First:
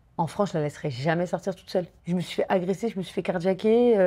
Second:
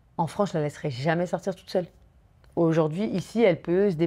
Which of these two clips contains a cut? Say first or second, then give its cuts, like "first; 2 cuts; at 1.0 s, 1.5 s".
first; 1 cut; at 2.0 s